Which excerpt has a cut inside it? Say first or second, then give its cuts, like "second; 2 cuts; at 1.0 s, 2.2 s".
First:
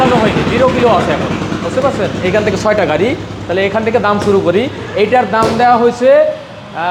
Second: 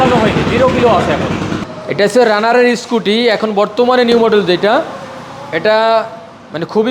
second; 1 cut; at 1.6 s